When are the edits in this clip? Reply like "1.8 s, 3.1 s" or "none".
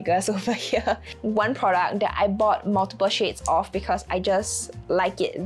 none